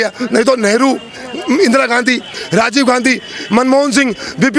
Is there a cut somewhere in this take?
no; 0 cuts

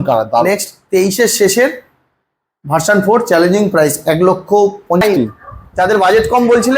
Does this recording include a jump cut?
yes; 1 cut; at 5.0 s

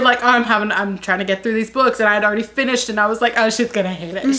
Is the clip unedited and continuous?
yes; 0 cuts

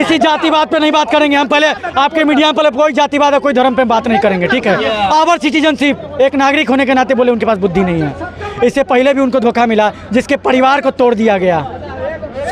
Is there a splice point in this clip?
no; 0 cuts

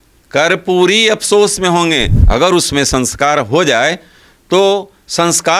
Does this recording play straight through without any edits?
no; 1 cut; at 2.2 s

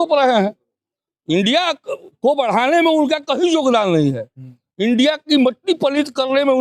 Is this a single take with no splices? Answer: yes; 0 cuts

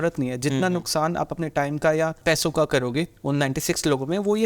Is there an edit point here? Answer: yes; 2 cuts; at 2.2 s, 3.1 s

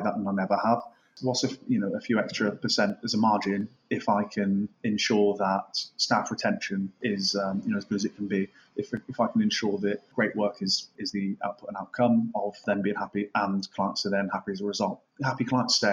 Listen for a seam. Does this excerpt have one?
yes; 1 cut; at 1.0 s

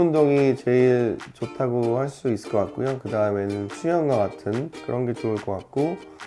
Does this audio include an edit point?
no; 0 cuts

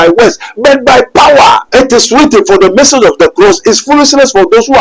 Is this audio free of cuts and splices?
no; 1 cut; at 1.6 s

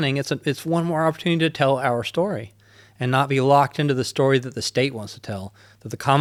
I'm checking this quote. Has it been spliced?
no; 0 cuts

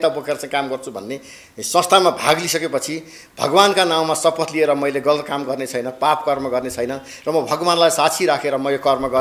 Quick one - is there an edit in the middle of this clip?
no; 0 cuts

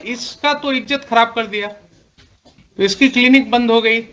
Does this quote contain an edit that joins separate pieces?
yes; 1 cut; at 2.6 s

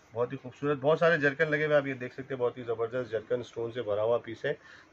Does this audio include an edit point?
no; 0 cuts

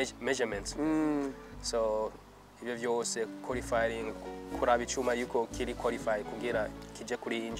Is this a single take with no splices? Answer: yes; 0 cuts

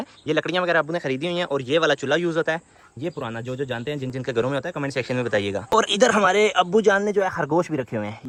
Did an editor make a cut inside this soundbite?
no; 0 cuts

